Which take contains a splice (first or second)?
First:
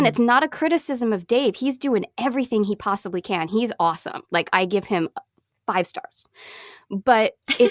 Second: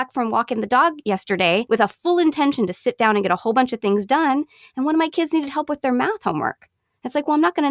second